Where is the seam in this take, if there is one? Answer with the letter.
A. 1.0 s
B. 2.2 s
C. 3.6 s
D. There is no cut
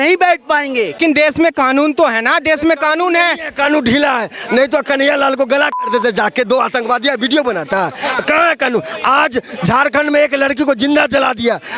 A